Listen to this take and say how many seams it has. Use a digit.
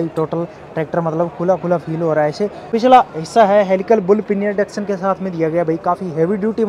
1